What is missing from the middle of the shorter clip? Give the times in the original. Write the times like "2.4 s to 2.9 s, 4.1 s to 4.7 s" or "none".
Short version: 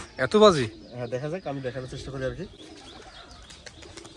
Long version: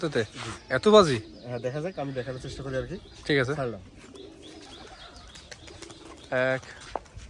3.1 s to 4.4 s